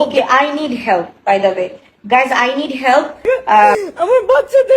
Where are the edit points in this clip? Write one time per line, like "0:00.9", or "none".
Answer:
0:03.8